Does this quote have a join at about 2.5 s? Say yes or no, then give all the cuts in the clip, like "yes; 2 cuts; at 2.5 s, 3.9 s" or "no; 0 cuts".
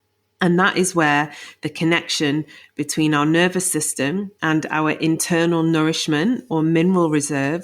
no; 1 cut; at 4.3 s